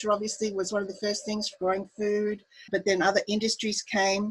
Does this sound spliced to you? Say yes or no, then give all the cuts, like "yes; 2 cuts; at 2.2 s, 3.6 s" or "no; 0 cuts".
yes; 1 cut; at 2.7 s